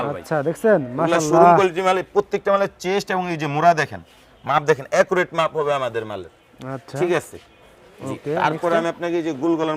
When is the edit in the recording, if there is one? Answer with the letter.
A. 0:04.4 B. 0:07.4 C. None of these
C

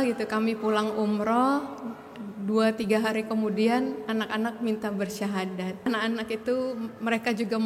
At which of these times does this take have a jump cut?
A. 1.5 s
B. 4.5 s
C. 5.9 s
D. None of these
C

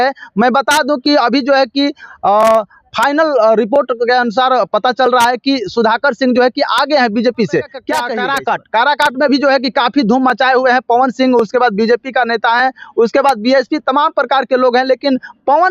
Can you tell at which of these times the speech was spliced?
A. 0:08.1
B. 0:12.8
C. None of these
A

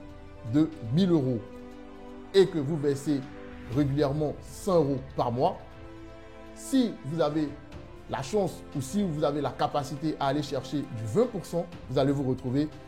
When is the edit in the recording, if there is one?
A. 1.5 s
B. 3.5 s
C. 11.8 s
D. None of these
C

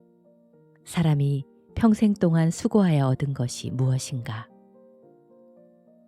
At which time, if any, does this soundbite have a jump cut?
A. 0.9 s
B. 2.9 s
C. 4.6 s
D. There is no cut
A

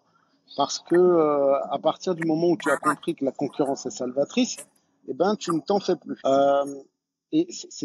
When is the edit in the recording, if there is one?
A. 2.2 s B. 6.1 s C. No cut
B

